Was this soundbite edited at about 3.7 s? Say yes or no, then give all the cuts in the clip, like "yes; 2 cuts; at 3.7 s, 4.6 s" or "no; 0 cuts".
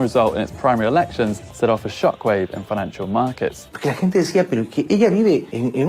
yes; 1 cut; at 3.7 s